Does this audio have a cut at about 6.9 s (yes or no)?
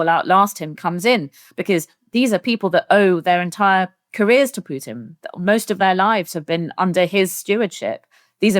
yes